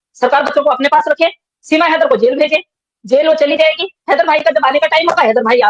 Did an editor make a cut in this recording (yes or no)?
no